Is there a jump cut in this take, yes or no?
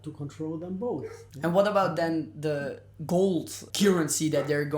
yes